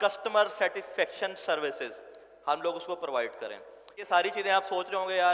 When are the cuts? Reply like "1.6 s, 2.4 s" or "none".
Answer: 4.1 s